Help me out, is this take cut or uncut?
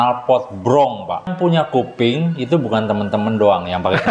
cut